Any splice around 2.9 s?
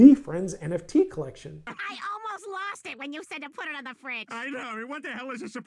no; 1 cut; at 1.5 s

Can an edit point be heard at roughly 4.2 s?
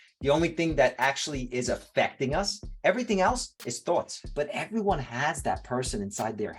yes; 1 cut; at 4.2 s

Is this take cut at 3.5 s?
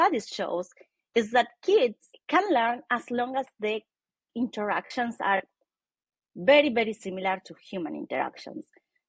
no; 1 cut; at 2.1 s

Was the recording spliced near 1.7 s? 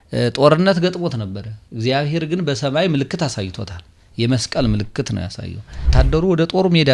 no; 1 cut; at 5.9 s

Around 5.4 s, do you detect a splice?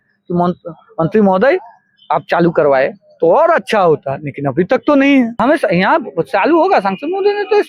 yes; 1 cut; at 5.4 s

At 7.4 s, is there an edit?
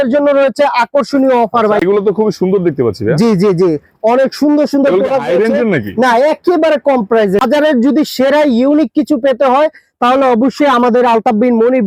yes; 2 cuts; at 1.8 s, 7.4 s

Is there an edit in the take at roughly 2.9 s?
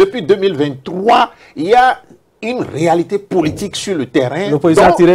no; 0 cuts

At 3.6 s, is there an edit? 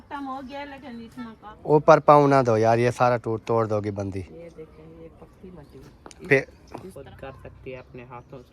no; 2 cuts; at 1.4 s, 6.9 s

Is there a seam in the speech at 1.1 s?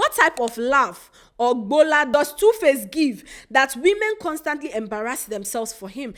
no; 0 cuts

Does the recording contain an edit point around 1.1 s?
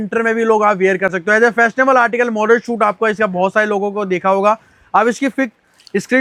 no; 0 cuts

